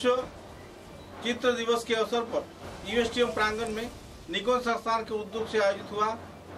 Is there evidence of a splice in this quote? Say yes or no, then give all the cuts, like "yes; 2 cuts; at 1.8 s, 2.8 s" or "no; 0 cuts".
no; 0 cuts